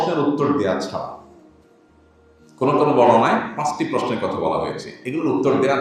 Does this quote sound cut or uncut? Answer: uncut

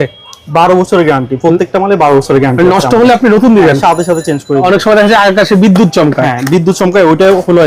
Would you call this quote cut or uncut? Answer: cut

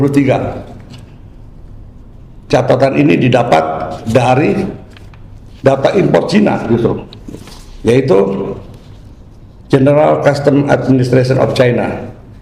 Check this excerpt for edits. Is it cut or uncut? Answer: uncut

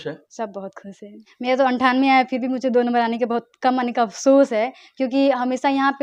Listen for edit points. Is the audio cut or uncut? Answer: cut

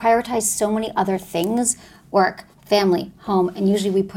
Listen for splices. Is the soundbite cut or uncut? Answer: uncut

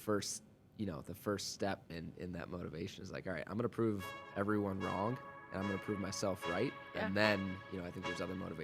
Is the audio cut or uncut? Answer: uncut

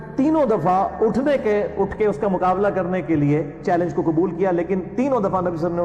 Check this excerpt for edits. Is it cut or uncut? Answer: uncut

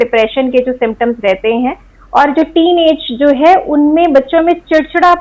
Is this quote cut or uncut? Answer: uncut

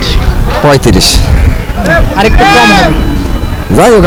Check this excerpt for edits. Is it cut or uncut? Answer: uncut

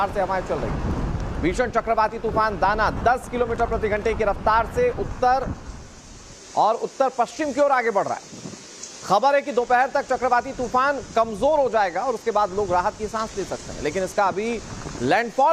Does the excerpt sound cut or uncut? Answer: uncut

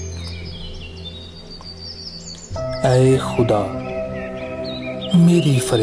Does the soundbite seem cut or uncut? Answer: cut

